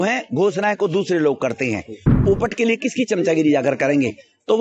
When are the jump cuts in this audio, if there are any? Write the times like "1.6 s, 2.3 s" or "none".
2.2 s